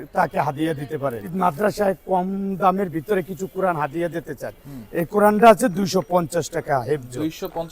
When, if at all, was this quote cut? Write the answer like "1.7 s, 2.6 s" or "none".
1.2 s